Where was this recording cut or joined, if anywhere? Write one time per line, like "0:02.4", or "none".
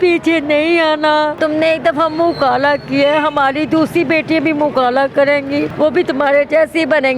0:01.3
0:05.7